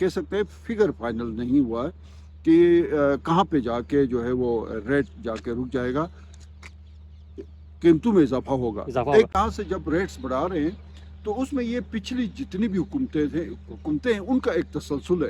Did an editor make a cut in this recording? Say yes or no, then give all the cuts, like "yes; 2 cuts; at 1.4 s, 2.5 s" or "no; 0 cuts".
yes; 1 cut; at 9.3 s